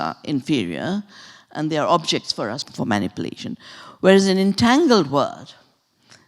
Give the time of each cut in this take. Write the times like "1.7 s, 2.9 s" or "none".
2.7 s